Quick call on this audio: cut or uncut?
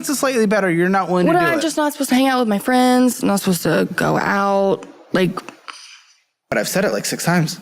cut